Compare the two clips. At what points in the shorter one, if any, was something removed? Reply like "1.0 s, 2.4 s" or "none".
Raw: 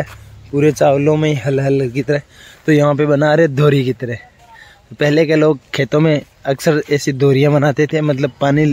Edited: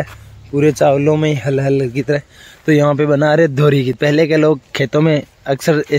3.9 s